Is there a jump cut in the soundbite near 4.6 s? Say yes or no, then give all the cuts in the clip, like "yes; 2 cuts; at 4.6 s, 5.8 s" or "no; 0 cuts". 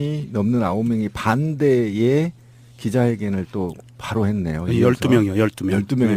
yes; 1 cut; at 4.6 s